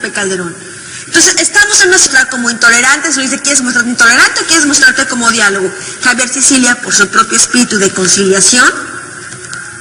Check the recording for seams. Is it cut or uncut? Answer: uncut